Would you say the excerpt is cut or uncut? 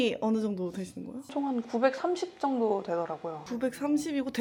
uncut